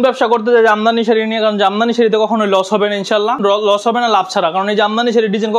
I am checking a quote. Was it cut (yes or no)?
yes